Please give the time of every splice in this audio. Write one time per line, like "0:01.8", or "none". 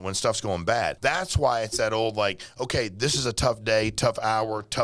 0:01.0